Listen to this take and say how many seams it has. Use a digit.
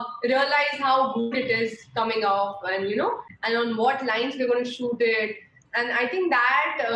1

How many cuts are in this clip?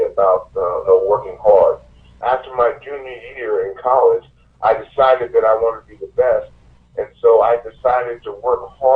1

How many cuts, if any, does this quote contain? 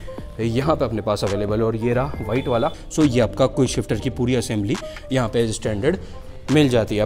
1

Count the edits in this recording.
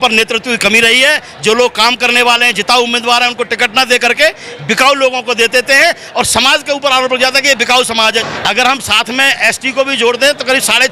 1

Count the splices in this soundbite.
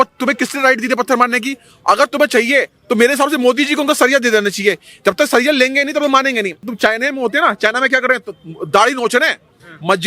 1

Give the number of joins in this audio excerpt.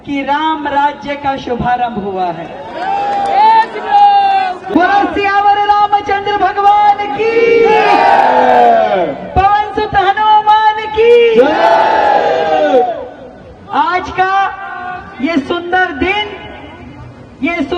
1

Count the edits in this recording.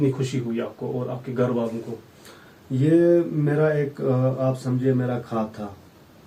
0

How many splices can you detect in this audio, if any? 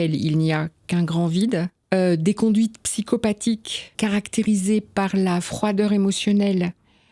2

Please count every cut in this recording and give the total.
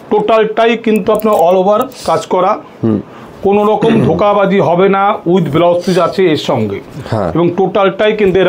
0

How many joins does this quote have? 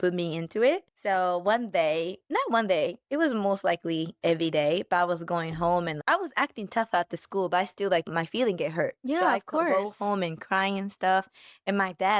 3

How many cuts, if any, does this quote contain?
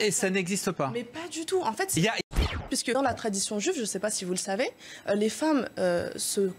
1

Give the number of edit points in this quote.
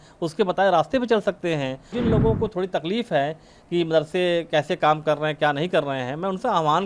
1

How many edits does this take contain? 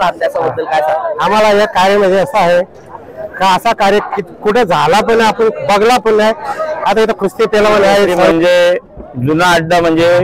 1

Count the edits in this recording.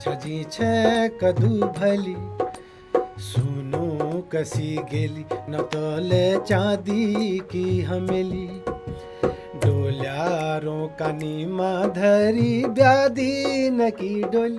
1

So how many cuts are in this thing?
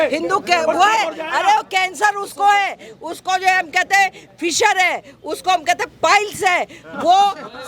0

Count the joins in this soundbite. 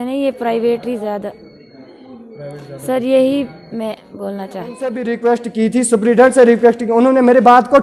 1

